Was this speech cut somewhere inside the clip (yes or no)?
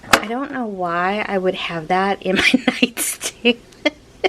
no